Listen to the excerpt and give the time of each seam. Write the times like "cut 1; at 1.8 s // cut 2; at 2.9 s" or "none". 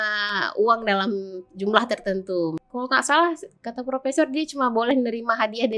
cut 1; at 2.6 s